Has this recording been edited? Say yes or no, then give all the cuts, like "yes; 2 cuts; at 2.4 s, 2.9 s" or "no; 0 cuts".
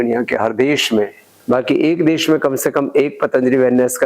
yes; 1 cut; at 1.3 s